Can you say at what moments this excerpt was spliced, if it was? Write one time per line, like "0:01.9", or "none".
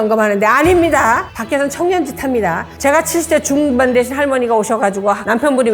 0:02.7